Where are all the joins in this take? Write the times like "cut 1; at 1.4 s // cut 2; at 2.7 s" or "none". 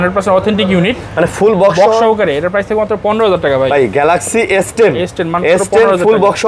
none